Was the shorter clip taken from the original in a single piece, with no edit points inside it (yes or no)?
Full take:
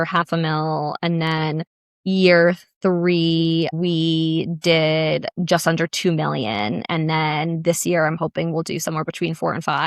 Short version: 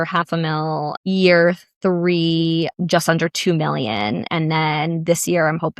no